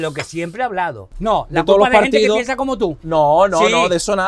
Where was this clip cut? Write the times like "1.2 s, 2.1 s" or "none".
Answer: 1.1 s